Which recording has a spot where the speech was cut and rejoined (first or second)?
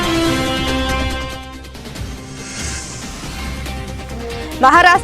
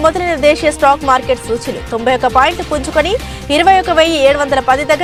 first